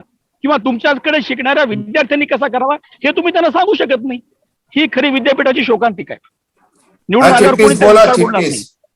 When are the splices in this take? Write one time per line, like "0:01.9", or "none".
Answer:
0:07.0